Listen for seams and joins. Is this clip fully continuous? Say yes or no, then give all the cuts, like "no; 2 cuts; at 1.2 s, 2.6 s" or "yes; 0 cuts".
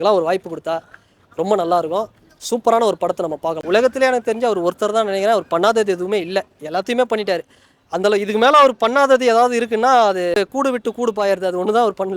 no; 2 cuts; at 3.5 s, 10.4 s